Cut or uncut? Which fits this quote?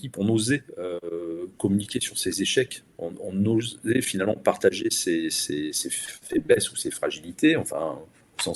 uncut